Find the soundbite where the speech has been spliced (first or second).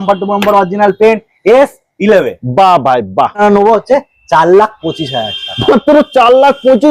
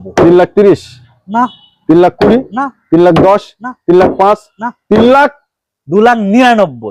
first